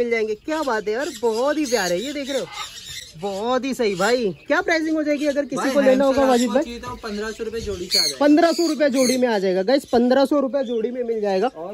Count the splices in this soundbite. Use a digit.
0